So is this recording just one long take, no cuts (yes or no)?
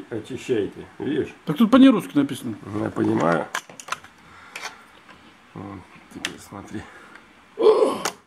yes